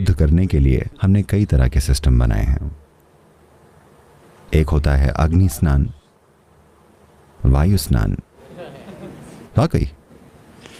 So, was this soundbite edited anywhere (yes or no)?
no